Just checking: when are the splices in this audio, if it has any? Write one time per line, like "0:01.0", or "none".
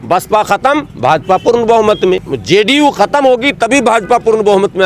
0:02.3